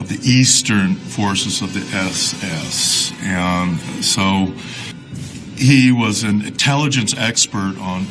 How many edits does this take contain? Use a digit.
1